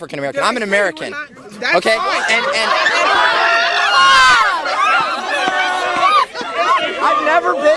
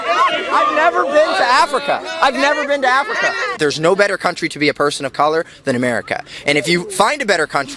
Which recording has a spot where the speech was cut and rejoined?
second; 1 cut; at 3.6 s

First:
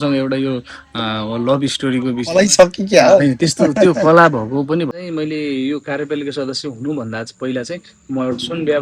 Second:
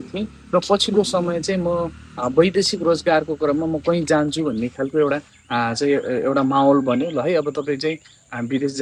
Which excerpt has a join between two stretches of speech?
first; 1 cut; at 4.9 s

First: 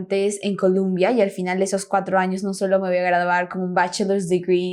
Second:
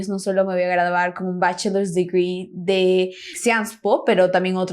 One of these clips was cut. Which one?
second; 1 cut; at 3.3 s

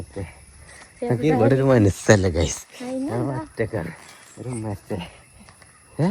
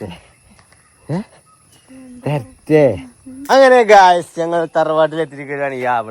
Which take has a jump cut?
second; 1 cut; at 3.5 s

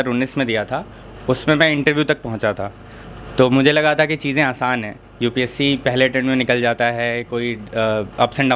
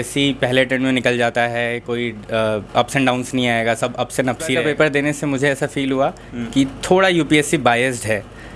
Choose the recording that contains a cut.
second; 1 cut; at 4.6 s

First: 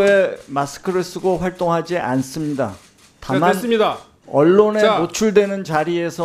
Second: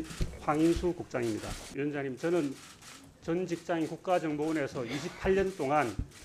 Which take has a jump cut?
second; 1 cut; at 1.6 s

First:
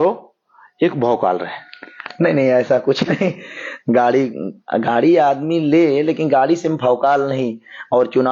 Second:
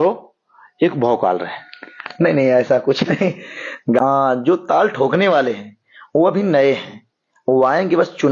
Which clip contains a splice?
second; 1 cut; at 4.0 s

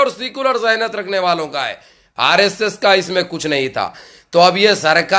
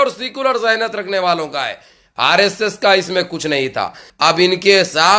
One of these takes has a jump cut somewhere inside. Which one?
second; 1 cut; at 4.0 s

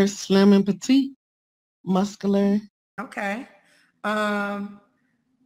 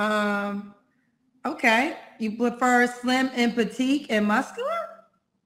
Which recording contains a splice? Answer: first; 1 cut; at 2.8 s

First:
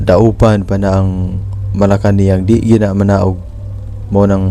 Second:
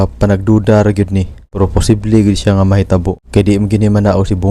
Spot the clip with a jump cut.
second; 2 cuts; at 1.4 s, 3.2 s

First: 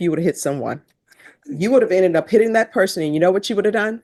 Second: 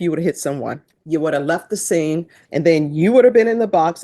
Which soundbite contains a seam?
second; 2 cuts; at 0.9 s, 2.4 s

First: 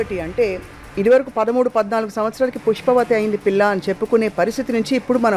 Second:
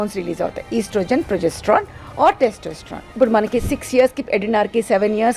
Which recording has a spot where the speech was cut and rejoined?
second; 1 cut; at 3.1 s

